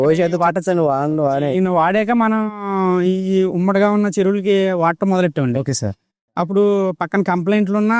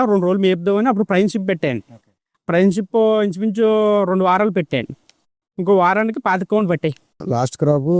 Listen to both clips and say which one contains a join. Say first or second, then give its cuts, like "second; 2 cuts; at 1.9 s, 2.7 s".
second; 1 cut; at 7.1 s